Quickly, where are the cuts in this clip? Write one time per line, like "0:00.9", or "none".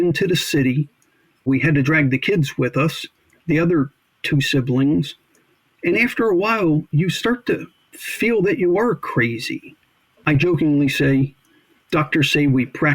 0:01.5
0:10.1

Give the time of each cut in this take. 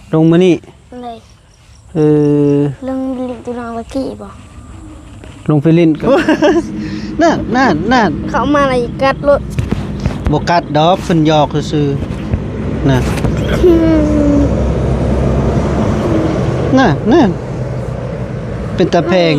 0:06.0

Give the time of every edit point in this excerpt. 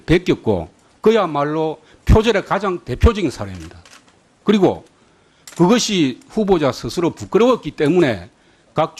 none

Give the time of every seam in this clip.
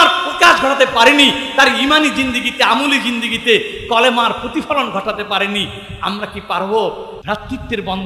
0:07.1

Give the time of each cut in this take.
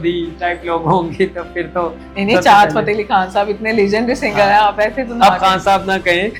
none

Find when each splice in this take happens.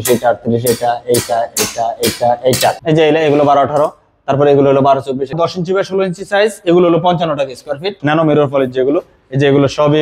0:02.8
0:05.3
0:08.0

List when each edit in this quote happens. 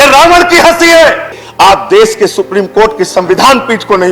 0:01.4

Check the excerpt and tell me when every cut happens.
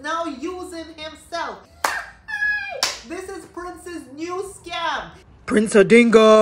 0:01.7
0:05.2

